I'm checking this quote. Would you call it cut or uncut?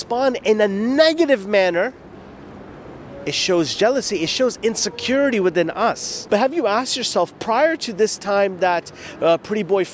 cut